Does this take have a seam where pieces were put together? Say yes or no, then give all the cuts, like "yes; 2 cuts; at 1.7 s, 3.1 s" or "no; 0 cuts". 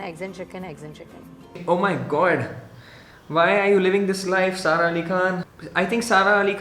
yes; 2 cuts; at 1.6 s, 5.5 s